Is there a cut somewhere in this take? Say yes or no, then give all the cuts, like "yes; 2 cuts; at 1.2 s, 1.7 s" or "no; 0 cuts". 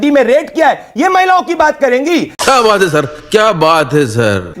no; 0 cuts